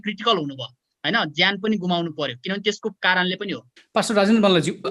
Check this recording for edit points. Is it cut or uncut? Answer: uncut